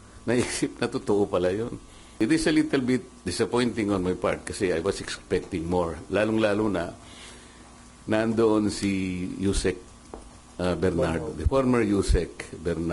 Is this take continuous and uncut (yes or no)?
no